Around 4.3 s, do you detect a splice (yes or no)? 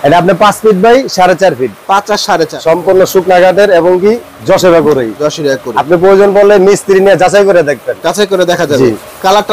no